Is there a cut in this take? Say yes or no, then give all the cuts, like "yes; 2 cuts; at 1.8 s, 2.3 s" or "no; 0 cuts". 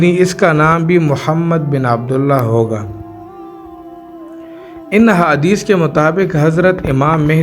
yes; 2 cuts; at 2.8 s, 4.8 s